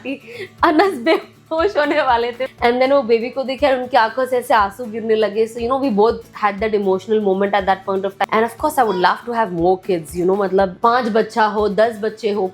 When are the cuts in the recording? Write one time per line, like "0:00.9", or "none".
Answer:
0:02.4
0:08.3
0:10.7